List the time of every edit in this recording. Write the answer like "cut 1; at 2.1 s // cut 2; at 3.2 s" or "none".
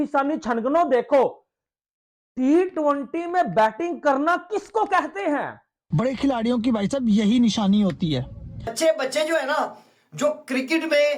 cut 1; at 5.9 s // cut 2; at 8.7 s